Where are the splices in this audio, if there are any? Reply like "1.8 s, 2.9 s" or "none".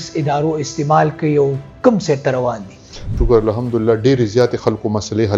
3.1 s